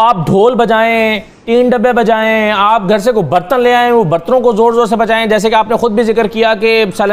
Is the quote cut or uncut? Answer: uncut